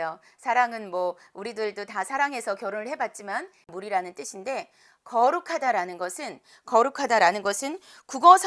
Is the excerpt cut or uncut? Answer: cut